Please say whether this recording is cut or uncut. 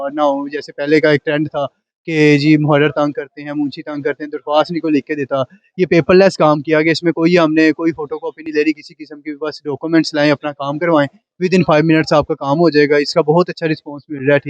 uncut